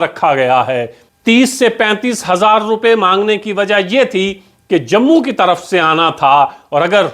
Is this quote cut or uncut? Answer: cut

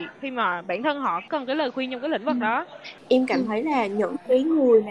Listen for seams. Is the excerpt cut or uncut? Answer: cut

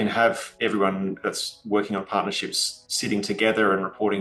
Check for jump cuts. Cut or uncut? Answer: uncut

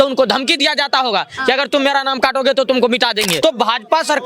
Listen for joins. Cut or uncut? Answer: cut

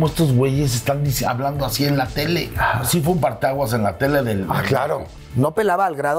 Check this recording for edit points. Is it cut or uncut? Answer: cut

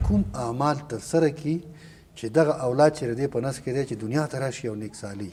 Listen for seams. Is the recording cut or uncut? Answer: uncut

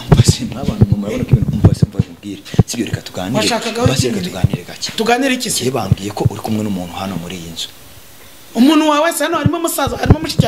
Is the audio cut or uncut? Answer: uncut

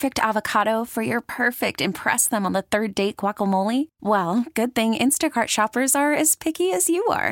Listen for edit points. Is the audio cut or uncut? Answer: uncut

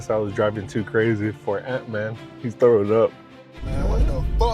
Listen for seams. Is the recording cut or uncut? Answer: cut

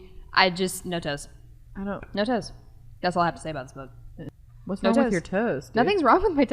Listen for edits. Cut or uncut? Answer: cut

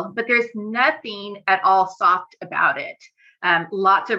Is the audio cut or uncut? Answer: uncut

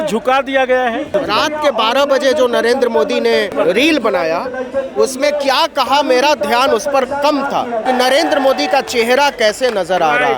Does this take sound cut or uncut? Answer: cut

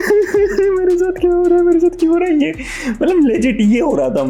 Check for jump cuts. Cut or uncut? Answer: uncut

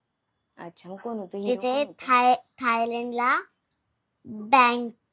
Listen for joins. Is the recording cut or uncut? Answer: uncut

